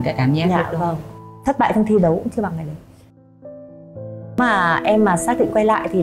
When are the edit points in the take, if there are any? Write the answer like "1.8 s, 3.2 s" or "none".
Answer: 4.4 s

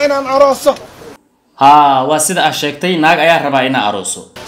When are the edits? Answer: 0.9 s

